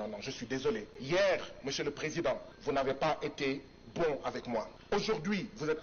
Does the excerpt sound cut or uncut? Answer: cut